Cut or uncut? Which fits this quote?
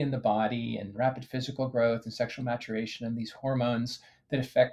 uncut